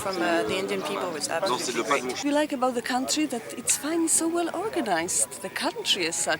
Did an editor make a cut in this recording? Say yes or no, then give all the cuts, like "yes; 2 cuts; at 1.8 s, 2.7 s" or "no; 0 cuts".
yes; 1 cut; at 2.2 s